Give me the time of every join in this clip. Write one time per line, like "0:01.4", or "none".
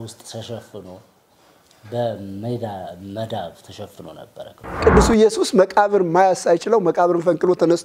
0:04.8